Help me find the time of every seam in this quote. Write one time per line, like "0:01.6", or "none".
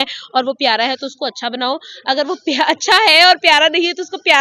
none